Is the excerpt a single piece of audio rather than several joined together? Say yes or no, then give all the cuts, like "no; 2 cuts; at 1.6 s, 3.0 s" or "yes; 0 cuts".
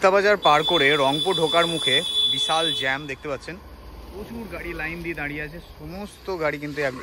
yes; 0 cuts